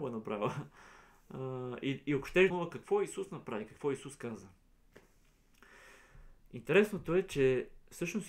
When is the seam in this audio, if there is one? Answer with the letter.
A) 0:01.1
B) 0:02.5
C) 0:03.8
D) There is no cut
B